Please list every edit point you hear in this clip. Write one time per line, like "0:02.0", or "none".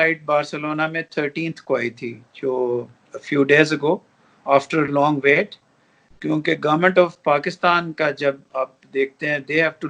none